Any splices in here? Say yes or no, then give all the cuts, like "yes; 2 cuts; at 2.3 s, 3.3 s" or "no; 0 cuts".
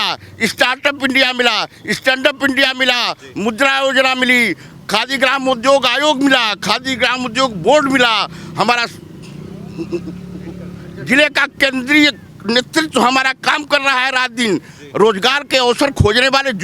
no; 0 cuts